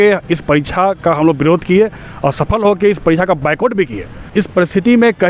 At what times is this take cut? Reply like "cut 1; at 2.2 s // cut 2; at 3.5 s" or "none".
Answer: cut 1; at 4.3 s